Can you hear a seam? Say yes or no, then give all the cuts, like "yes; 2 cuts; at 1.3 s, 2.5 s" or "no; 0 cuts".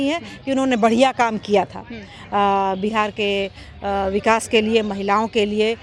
no; 0 cuts